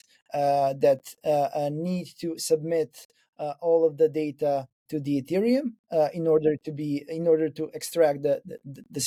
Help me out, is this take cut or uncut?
uncut